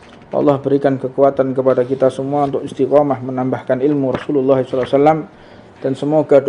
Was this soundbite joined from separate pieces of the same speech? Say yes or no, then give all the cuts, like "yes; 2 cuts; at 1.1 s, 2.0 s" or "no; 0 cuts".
no; 0 cuts